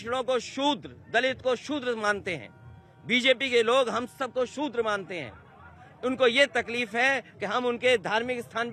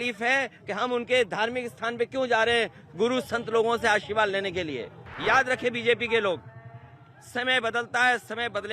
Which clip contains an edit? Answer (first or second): second